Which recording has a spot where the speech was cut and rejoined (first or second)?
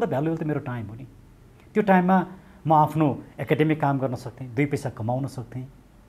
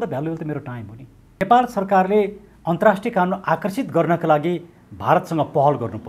second